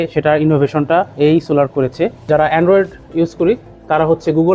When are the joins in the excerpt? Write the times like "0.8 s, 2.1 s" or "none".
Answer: 2.3 s